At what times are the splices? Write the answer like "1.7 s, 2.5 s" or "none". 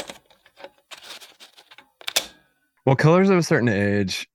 none